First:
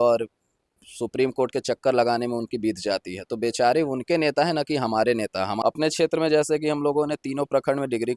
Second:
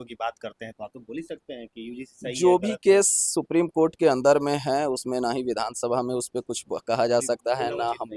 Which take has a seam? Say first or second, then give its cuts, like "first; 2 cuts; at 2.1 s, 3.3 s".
first; 1 cut; at 5.6 s